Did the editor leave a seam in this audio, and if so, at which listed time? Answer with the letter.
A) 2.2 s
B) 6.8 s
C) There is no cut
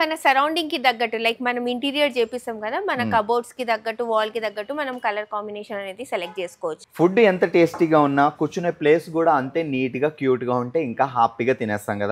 B